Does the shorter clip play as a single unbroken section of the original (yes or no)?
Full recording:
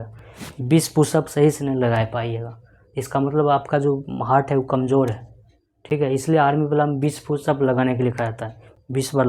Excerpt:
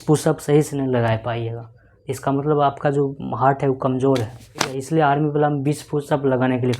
no